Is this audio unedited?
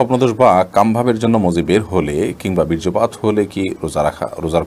yes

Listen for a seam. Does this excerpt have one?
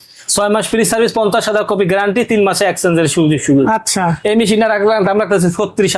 no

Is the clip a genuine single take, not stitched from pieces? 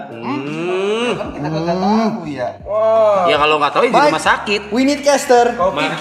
yes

